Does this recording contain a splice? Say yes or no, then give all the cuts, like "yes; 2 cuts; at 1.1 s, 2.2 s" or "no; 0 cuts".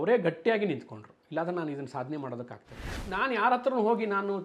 yes; 1 cut; at 3.0 s